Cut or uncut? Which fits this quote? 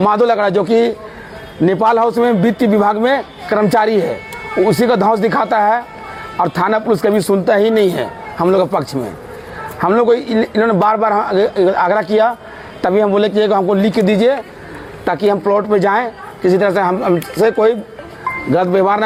uncut